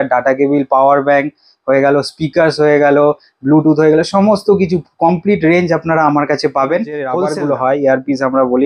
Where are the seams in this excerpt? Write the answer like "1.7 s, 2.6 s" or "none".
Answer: 7.2 s